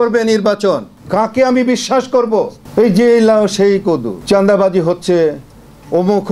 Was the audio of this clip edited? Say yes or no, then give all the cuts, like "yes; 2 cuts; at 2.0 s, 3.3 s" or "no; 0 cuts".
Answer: yes; 3 cuts; at 0.9 s, 2.6 s, 4.1 s